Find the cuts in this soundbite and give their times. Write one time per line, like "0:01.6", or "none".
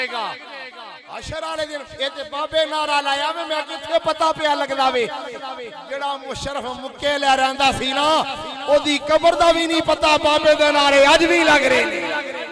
none